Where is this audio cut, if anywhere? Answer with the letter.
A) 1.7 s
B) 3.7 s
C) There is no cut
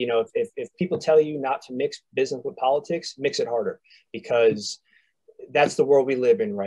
C